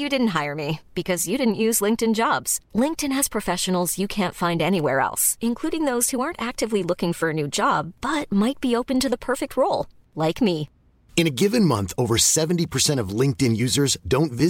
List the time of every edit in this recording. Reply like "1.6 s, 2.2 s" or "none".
none